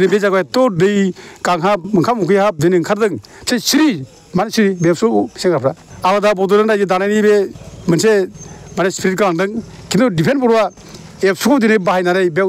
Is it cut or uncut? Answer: cut